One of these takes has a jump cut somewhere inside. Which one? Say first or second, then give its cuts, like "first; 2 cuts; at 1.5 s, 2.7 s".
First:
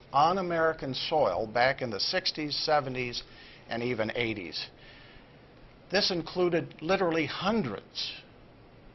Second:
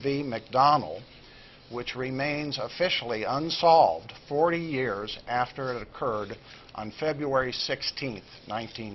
second; 1 cut; at 5.0 s